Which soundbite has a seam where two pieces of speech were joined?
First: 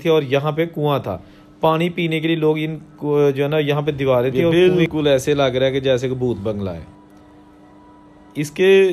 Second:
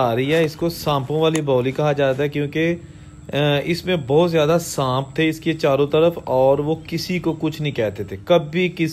first; 1 cut; at 4.5 s

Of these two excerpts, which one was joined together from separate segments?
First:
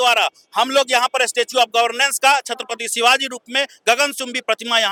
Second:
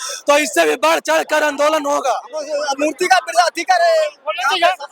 second; 1 cut; at 2.6 s

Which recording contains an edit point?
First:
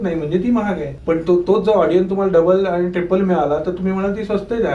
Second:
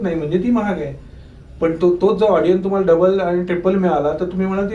first; 1 cut; at 0.9 s

